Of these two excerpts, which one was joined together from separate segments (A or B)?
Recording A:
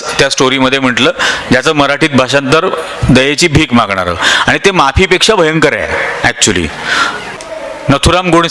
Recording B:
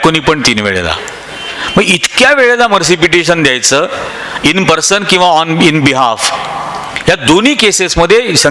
A